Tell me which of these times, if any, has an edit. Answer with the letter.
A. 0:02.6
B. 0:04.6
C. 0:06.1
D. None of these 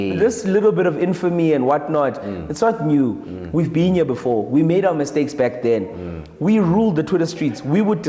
D